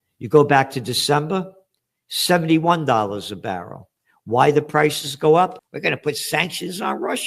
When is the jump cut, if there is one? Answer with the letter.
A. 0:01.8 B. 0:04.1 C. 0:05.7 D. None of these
C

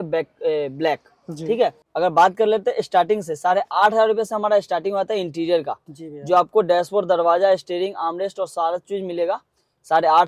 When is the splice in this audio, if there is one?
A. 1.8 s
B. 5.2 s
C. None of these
A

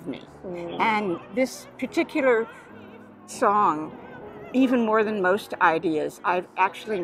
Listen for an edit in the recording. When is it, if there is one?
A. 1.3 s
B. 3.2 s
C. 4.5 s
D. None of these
B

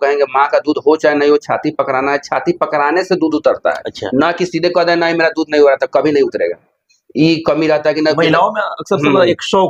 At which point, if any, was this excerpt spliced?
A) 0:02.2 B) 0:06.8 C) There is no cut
C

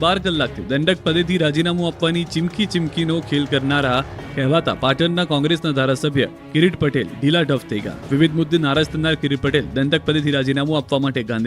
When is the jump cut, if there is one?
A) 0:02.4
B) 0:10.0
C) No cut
A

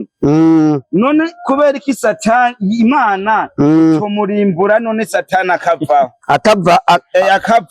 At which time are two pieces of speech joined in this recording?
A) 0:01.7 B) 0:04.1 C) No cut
C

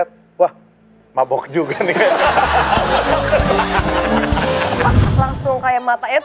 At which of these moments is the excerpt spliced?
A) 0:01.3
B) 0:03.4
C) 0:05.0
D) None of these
C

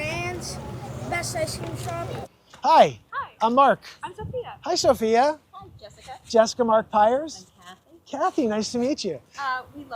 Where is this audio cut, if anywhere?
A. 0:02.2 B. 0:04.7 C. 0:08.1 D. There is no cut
A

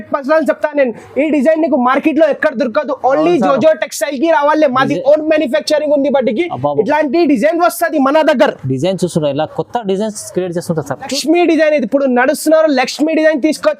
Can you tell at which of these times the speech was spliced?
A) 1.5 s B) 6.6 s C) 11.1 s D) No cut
C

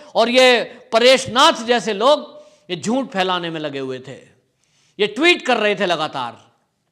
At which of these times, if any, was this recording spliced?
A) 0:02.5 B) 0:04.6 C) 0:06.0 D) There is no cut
D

